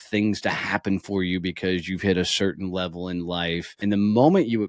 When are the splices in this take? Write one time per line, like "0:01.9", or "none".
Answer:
0:03.7